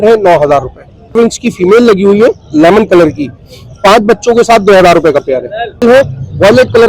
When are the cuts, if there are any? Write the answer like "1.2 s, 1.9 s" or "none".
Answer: 1.2 s, 5.8 s